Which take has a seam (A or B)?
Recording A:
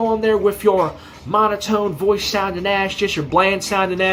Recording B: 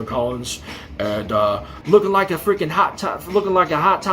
B